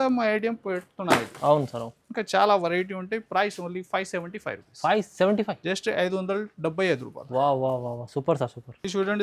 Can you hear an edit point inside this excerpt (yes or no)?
no